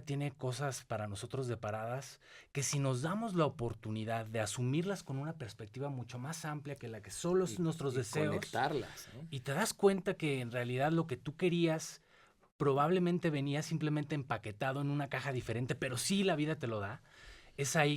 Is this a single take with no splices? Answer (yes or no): yes